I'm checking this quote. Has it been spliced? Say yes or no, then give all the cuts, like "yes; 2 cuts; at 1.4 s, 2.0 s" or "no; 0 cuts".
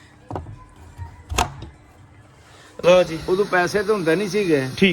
yes; 1 cut; at 3.2 s